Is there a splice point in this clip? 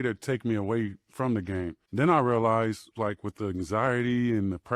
yes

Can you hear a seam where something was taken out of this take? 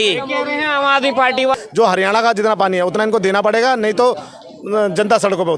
yes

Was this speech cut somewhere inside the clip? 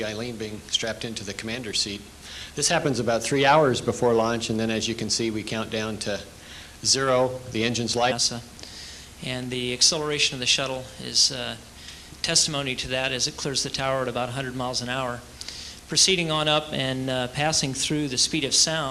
no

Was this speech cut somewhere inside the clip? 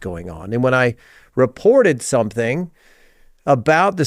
no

